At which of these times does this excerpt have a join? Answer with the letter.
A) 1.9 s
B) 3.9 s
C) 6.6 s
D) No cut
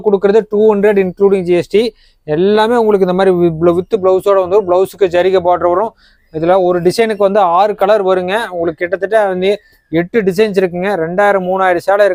D